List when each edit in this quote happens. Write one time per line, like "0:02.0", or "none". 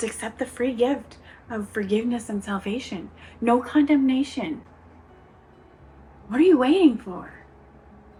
none